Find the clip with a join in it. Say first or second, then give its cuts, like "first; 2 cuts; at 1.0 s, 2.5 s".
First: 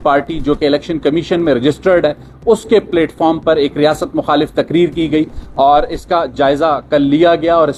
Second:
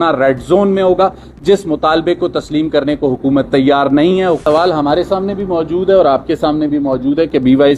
second; 1 cut; at 4.4 s